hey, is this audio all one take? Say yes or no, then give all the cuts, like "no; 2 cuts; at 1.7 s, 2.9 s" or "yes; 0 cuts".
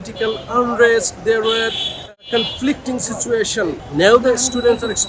no; 1 cut; at 3.8 s